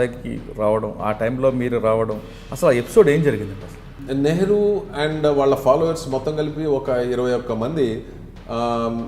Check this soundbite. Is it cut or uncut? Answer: cut